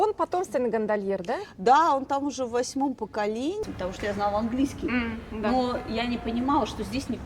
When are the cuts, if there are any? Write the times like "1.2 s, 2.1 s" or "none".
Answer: 3.6 s